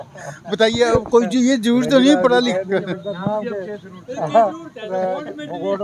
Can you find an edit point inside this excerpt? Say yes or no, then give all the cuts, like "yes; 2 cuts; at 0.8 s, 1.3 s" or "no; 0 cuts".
no; 0 cuts